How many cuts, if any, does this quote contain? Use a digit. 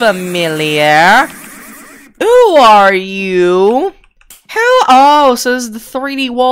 0